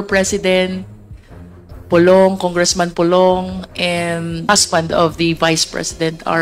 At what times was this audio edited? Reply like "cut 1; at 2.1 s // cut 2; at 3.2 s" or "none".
cut 1; at 4.5 s